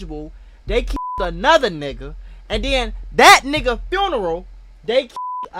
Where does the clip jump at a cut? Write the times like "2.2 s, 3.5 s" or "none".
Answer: none